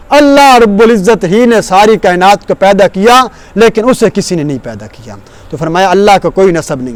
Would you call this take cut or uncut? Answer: uncut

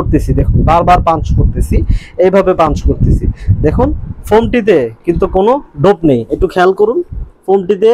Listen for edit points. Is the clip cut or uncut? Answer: uncut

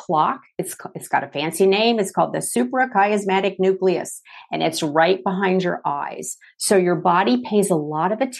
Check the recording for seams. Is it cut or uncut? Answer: uncut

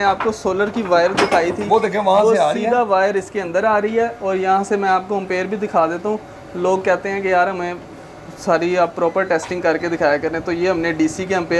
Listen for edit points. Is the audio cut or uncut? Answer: uncut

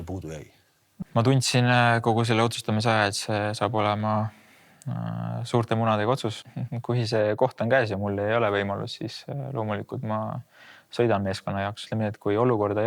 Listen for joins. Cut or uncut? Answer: cut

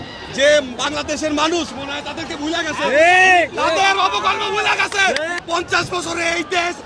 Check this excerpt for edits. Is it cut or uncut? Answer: cut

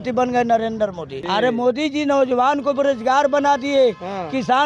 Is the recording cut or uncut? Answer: uncut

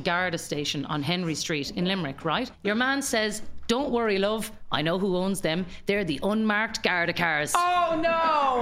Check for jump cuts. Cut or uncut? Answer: cut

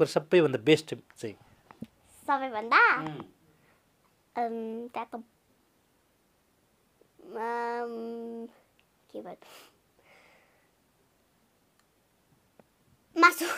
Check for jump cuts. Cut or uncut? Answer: uncut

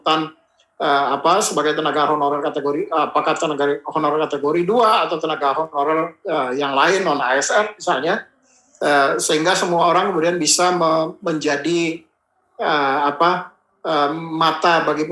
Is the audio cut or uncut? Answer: uncut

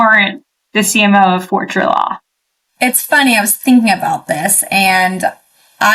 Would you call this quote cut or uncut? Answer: uncut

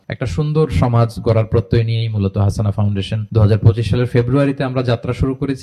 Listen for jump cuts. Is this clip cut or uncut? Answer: cut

